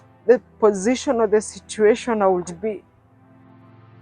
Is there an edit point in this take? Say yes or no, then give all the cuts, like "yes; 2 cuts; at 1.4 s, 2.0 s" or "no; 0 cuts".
no; 0 cuts